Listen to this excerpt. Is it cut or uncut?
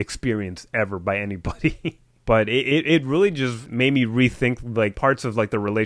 uncut